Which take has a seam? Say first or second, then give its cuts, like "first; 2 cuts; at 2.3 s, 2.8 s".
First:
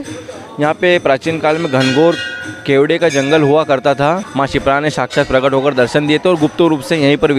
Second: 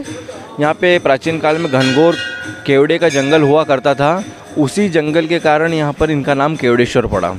first; 1 cut; at 4.3 s